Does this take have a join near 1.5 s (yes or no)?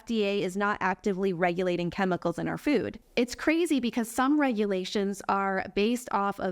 no